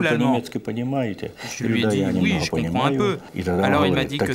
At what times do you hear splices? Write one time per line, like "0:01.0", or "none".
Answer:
0:03.3